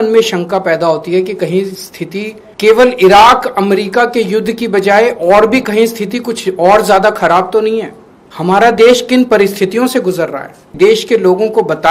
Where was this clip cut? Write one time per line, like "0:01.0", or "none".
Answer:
0:10.7